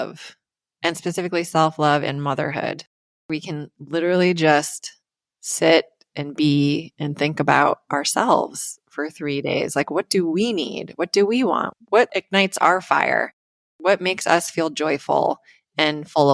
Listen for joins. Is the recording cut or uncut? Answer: cut